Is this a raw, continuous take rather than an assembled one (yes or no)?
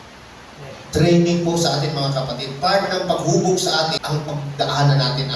no